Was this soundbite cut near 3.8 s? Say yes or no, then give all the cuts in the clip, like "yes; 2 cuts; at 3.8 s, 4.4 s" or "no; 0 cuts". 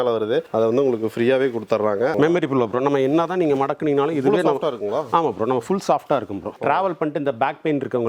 no; 2 cuts; at 2.1 s, 6.6 s